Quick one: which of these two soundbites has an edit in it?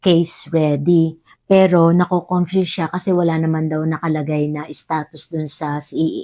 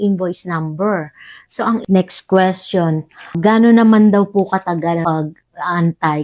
second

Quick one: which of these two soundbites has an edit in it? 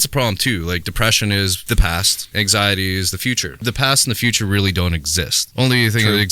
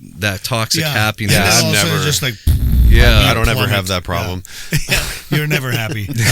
first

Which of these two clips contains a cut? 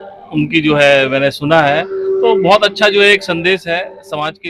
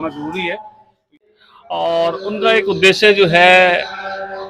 second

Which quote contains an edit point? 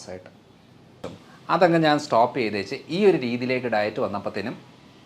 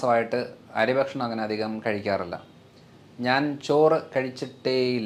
first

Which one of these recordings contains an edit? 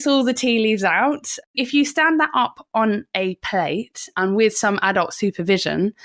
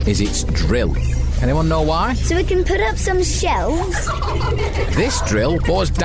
first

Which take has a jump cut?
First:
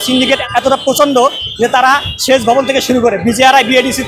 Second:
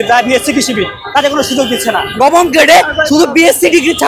second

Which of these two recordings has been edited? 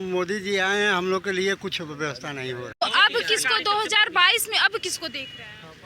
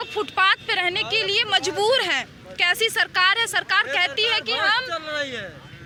first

